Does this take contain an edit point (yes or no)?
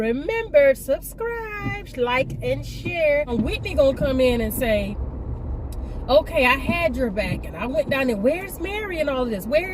yes